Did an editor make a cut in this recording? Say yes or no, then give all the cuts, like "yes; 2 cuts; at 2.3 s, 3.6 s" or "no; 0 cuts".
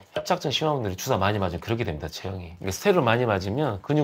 no; 0 cuts